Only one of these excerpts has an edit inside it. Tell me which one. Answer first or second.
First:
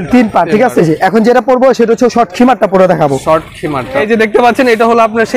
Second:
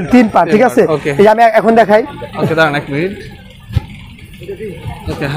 first